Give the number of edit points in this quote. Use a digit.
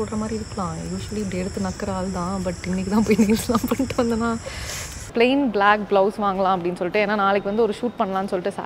1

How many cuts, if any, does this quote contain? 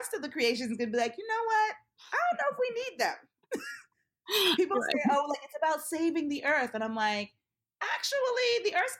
0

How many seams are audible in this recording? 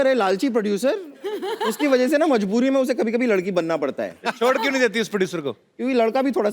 0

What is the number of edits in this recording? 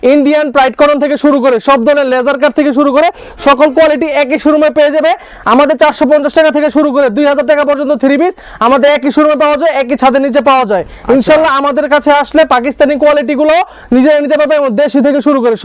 0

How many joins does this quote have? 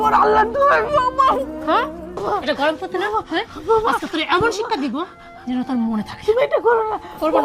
1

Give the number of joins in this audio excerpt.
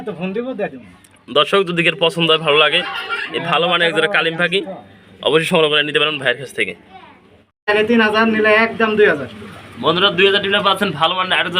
1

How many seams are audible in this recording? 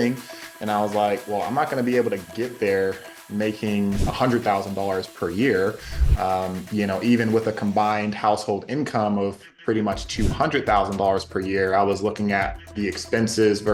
0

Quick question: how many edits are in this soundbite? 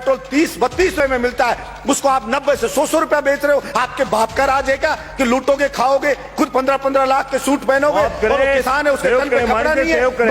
1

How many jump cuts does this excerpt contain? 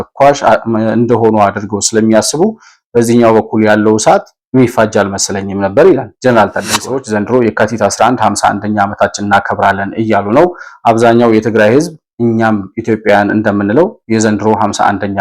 1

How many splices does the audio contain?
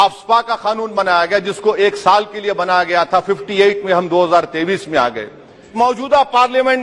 1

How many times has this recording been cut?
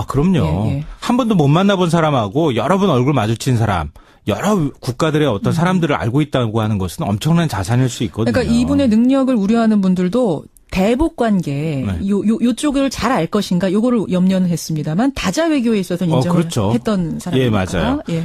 1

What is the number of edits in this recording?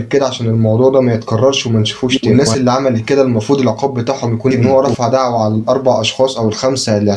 2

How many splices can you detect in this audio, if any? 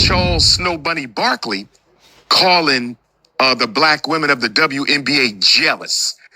0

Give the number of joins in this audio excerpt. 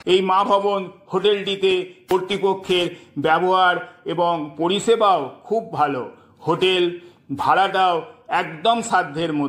1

